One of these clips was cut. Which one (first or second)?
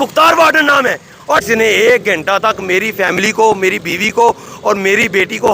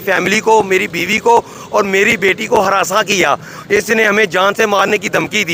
first